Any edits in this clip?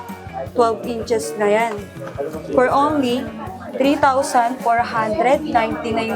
no; 0 cuts

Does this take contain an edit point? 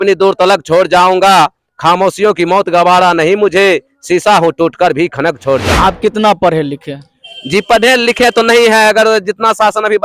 yes; 1 cut; at 5.7 s

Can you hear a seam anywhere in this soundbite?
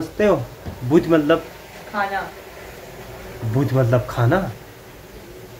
no; 0 cuts

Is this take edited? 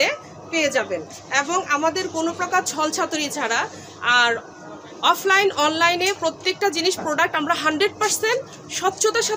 no; 0 cuts

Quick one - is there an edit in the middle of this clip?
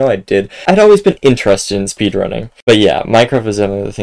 no; 0 cuts

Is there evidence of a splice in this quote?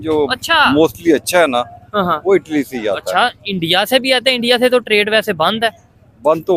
no; 0 cuts

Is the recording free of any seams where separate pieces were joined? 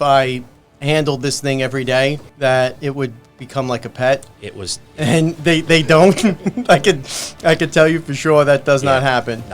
no; 1 cut; at 2.3 s

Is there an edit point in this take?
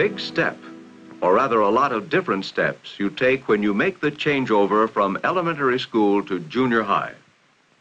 yes; 1 cut; at 2.2 s

